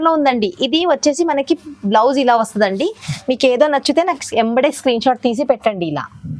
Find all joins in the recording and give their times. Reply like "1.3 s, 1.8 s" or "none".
3.1 s